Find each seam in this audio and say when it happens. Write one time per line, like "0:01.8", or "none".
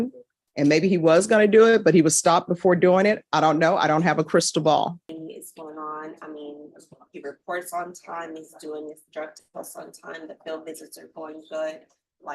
0:05.1